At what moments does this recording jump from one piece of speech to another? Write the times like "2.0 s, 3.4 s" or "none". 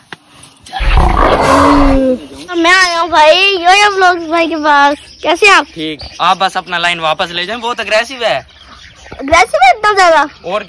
2.5 s

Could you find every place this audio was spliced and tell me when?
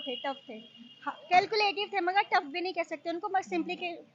none

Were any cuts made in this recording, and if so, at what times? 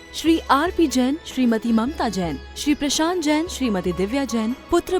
none

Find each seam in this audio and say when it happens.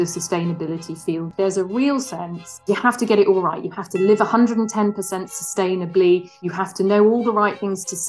1.3 s, 2.6 s

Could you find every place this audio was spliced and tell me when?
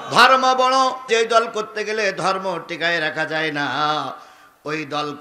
1.1 s

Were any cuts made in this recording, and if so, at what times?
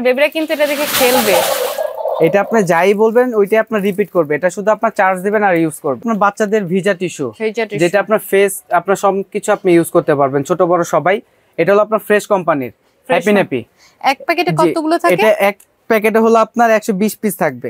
6.0 s

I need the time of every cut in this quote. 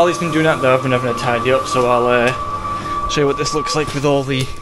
none

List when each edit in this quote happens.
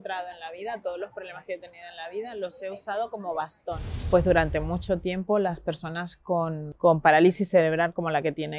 3.9 s

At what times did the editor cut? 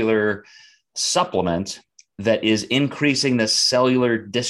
none

